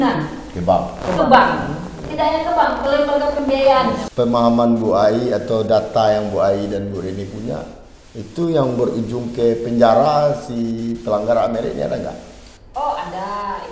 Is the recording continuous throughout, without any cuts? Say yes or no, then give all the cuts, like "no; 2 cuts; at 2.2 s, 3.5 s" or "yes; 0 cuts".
no; 1 cut; at 4.0 s